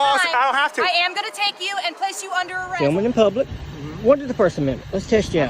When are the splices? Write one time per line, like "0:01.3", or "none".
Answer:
0:02.7